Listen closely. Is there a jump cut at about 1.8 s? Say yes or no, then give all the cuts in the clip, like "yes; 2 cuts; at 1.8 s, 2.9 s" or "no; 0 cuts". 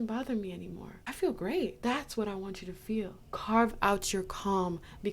yes; 1 cut; at 1.8 s